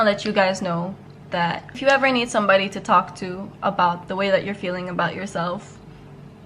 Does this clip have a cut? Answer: yes; 1 cut; at 1.4 s

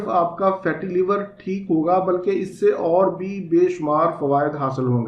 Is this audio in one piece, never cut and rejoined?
yes; 0 cuts

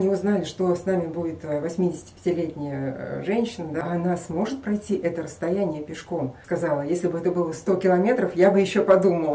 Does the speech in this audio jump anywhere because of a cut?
yes; 2 cuts; at 3.8 s, 6.4 s

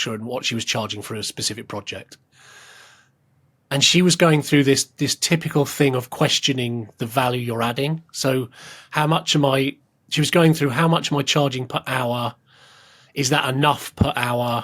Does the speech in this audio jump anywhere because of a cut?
no; 0 cuts

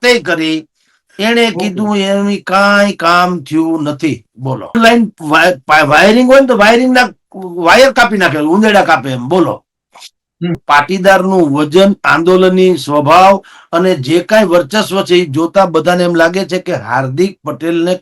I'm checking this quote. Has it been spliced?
yes; 2 cuts; at 4.7 s, 10.6 s

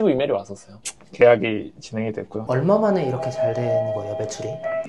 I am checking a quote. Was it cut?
yes; 2 cuts; at 1.0 s, 2.4 s

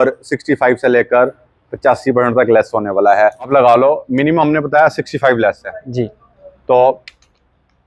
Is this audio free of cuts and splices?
no; 1 cut; at 3.5 s

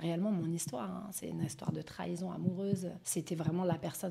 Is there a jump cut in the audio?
yes; 1 cut; at 3.0 s

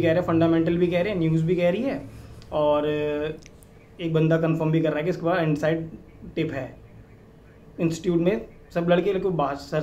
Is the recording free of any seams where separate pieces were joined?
yes; 0 cuts

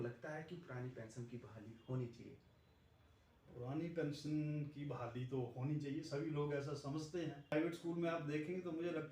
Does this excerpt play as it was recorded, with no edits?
no; 1 cut; at 7.5 s

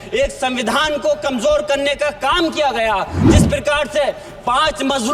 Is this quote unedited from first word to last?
no; 1 cut; at 3.3 s

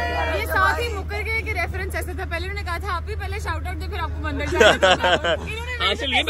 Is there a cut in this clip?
no; 0 cuts

